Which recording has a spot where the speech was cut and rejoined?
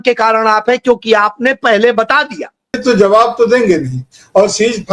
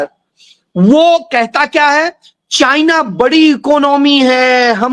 first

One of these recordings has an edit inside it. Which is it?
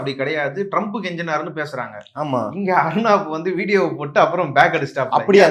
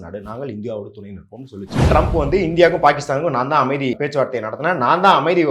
second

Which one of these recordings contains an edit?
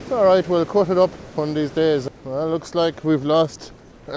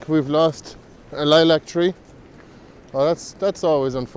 first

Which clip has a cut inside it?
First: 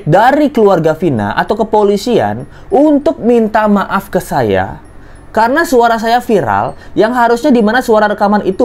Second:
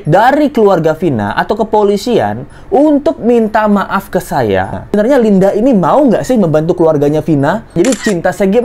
second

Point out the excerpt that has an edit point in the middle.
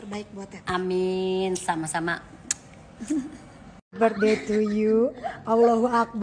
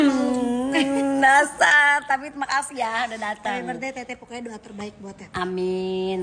first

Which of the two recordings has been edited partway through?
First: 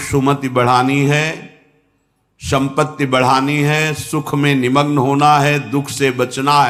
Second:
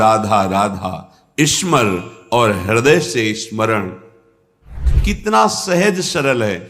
second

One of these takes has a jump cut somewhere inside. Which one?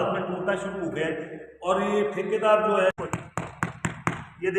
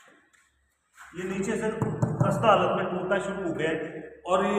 first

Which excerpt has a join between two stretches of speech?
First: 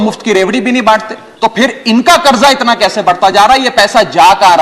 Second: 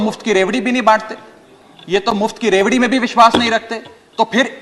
first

